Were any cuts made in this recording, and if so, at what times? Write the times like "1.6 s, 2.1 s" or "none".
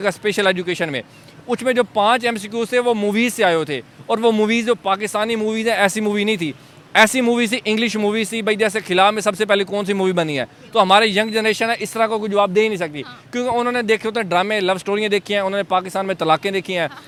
none